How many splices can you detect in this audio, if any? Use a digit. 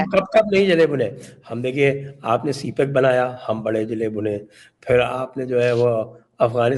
0